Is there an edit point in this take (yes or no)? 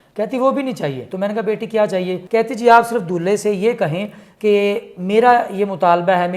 yes